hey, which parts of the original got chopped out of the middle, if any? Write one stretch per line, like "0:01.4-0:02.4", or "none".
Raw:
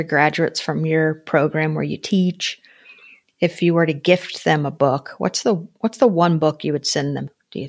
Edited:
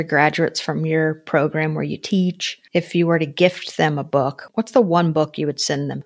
0:02.5-0:03.2
0:05.1-0:05.7